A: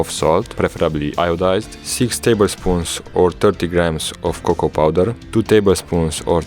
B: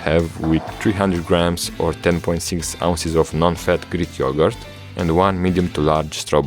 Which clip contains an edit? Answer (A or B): A